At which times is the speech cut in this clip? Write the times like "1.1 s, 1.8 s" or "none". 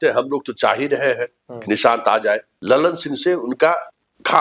2.5 s